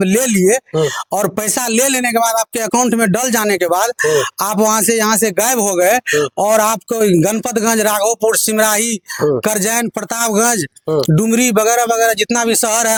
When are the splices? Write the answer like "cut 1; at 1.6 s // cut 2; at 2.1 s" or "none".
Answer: none